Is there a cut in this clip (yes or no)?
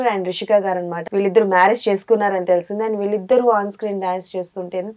yes